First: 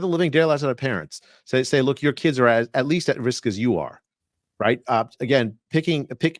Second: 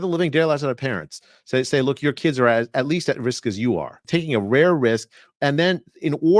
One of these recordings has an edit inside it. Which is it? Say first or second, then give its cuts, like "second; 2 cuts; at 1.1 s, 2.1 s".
second; 1 cut; at 4.0 s